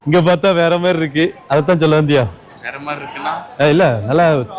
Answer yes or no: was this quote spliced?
no